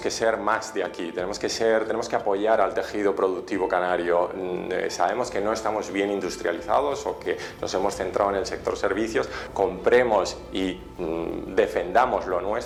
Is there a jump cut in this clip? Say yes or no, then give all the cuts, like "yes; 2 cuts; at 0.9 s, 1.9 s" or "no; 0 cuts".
no; 0 cuts